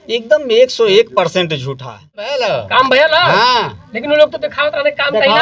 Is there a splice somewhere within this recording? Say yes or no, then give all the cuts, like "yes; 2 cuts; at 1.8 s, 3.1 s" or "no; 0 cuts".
yes; 1 cut; at 2.3 s